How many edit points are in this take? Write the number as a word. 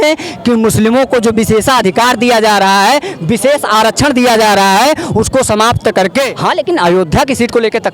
one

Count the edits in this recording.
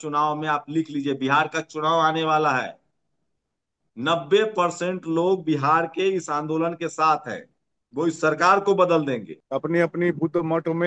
one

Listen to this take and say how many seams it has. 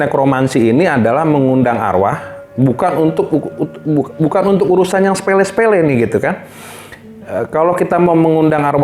zero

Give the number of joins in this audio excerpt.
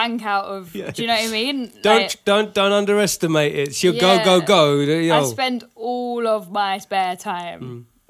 zero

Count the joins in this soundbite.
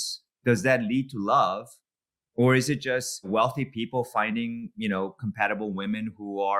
one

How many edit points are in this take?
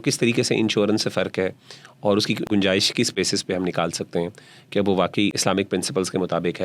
two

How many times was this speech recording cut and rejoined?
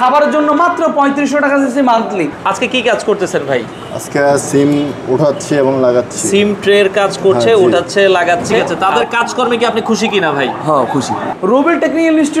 three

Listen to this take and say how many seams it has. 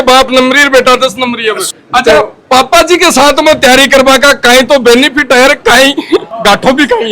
two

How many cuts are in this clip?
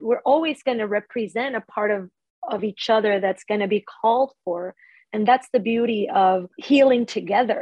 one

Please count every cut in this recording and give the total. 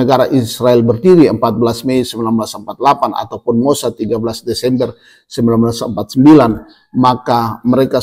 zero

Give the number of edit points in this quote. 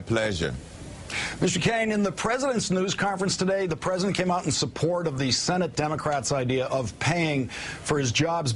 one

